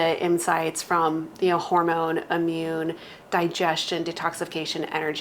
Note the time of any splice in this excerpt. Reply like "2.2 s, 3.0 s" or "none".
none